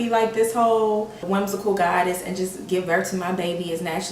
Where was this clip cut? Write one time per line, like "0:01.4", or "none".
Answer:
0:01.2